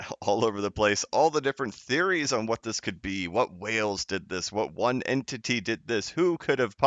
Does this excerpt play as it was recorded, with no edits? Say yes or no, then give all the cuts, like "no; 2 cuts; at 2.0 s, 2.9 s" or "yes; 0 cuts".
yes; 0 cuts